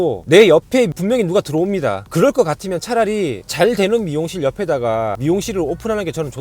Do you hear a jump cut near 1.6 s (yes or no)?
no